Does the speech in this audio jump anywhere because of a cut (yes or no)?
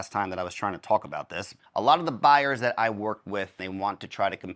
yes